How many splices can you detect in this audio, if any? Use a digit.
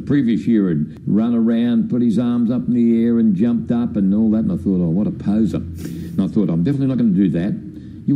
1